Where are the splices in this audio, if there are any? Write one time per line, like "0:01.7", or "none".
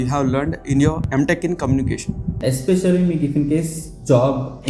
0:01.0
0:02.4